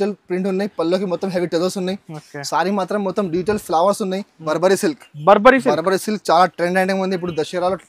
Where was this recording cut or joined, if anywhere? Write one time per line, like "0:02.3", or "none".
0:04.4